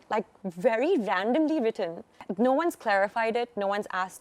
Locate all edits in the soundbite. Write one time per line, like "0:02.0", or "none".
0:02.2